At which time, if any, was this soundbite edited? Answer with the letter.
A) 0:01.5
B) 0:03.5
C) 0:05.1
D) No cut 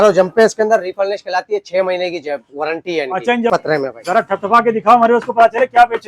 B